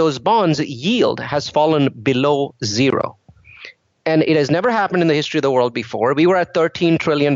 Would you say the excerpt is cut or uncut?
uncut